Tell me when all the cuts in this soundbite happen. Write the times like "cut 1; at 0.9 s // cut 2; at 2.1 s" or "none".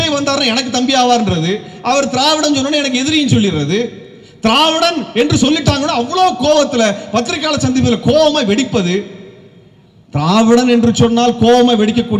none